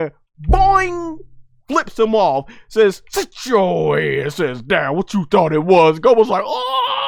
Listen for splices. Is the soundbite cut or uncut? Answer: uncut